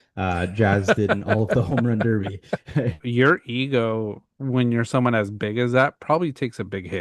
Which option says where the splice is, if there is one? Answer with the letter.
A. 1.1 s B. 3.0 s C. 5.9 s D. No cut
B